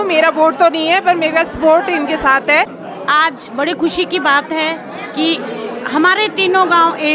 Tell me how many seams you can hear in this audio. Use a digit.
1